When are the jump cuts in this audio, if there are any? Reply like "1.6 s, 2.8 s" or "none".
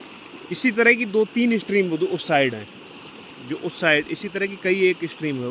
none